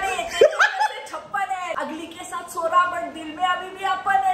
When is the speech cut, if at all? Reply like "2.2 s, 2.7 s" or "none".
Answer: 1.7 s